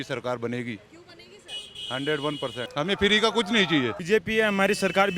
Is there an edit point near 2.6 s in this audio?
yes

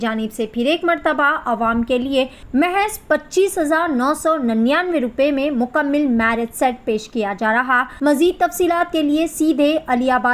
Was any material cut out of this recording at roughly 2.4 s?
yes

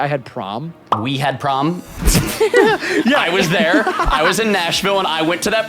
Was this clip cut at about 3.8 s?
no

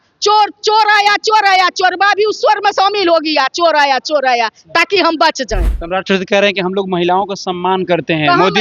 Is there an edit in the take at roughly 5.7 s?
yes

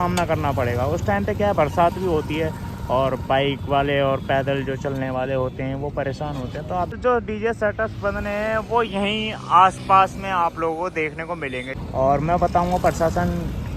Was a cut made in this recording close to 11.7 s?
yes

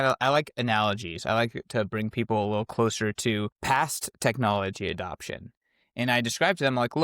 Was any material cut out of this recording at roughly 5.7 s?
no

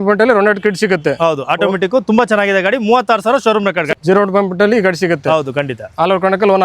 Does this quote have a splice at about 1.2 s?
no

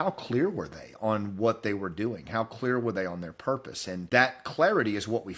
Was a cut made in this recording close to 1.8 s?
no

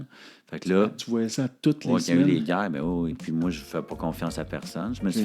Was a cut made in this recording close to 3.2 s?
yes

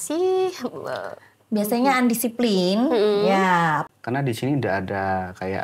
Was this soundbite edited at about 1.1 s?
no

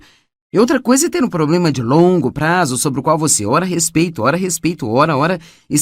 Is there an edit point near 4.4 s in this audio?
no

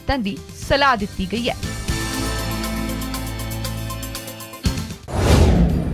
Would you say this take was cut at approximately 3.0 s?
no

